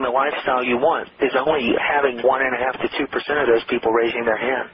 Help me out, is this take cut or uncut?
uncut